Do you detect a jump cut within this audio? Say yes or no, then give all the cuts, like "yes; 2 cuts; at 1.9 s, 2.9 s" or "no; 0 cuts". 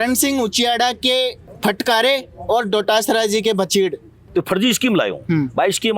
yes; 2 cuts; at 1.5 s, 4.3 s